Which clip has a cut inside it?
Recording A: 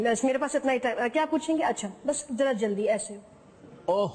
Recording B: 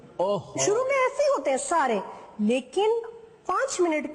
A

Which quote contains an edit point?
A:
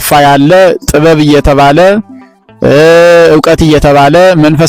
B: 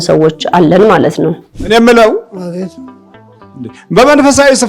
B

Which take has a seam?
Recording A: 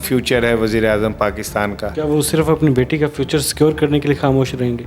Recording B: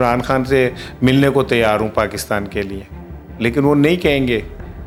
A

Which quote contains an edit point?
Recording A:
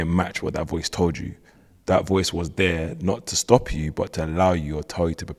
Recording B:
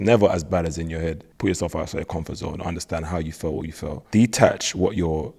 B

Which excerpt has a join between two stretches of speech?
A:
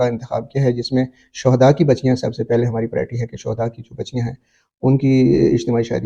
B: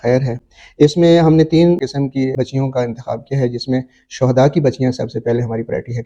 B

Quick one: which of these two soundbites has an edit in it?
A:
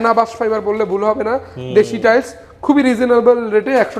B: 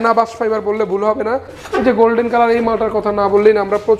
B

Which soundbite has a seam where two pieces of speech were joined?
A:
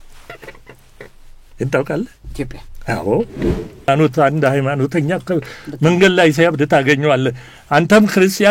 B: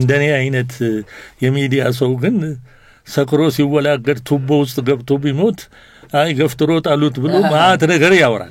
A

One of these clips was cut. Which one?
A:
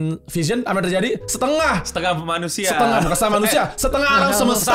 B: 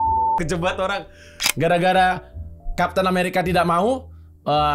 B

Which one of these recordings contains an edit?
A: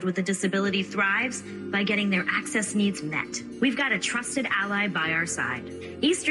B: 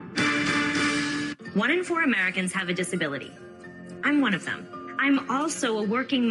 B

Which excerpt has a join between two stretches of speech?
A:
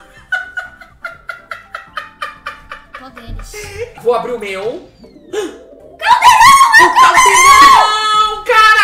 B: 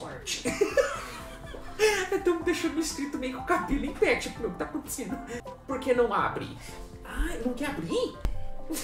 A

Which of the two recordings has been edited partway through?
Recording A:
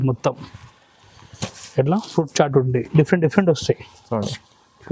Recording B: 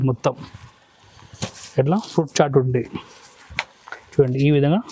A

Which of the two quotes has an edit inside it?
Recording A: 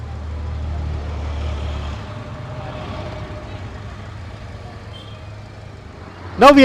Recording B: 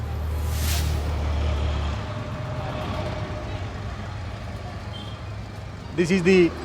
B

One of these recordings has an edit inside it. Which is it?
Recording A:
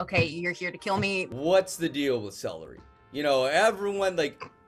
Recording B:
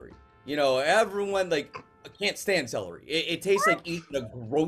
A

